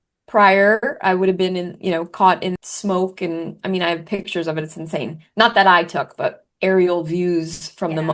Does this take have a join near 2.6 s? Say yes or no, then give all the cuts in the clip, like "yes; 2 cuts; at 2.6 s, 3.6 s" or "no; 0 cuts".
yes; 1 cut; at 2.6 s